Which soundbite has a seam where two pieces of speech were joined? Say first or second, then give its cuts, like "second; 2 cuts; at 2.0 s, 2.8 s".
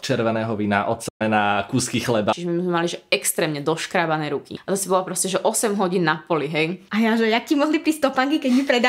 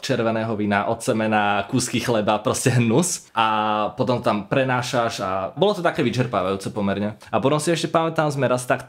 first; 3 cuts; at 2.3 s, 4.5 s, 6.8 s